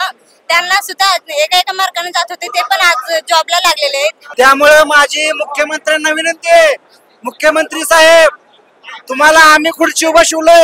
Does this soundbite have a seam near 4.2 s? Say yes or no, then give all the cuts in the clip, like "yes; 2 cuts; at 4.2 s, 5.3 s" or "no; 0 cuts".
yes; 1 cut; at 4.2 s